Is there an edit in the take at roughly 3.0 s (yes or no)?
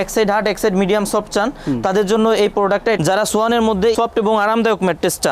yes